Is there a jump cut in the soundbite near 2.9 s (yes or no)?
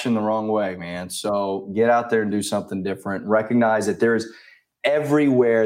no